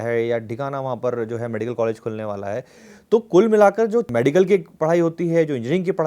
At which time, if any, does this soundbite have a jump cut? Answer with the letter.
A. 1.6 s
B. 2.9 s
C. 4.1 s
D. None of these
C